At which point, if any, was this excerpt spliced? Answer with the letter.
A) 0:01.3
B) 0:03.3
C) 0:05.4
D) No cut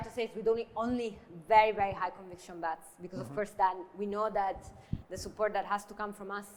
D